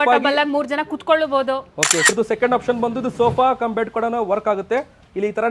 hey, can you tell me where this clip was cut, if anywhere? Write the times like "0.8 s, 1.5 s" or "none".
2.1 s